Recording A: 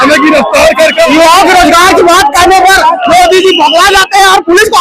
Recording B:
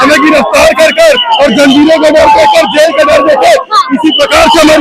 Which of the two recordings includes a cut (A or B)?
A